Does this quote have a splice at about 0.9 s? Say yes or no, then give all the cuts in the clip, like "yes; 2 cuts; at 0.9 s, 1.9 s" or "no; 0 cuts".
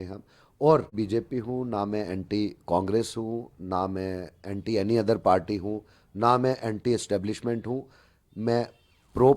yes; 1 cut; at 0.9 s